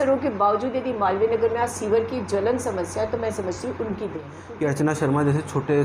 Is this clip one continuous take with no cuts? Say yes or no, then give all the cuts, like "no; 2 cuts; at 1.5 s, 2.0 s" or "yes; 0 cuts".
no; 1 cut; at 4.4 s